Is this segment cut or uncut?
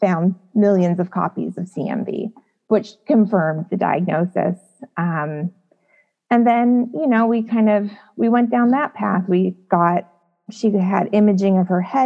uncut